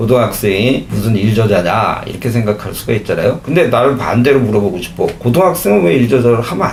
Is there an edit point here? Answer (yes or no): no